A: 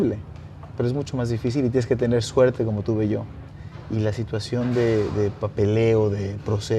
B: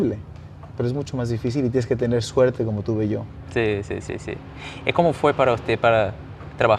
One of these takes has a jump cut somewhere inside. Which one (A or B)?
A